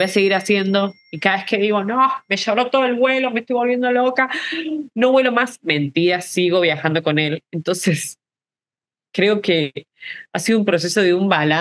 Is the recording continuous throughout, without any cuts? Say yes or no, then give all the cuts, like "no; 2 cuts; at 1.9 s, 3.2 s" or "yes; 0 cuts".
yes; 0 cuts